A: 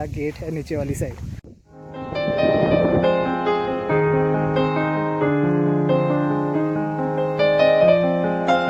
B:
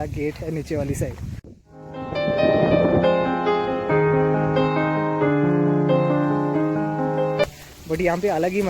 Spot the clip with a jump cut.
B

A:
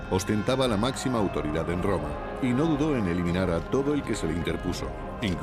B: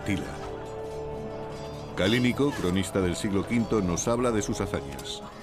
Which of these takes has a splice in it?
B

